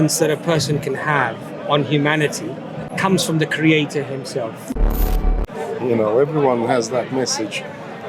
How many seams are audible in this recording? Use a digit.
2